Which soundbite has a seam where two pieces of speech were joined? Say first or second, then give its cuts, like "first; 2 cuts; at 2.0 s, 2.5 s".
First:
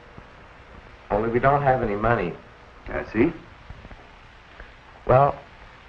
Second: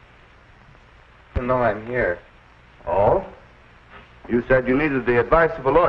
second; 1 cut; at 2.5 s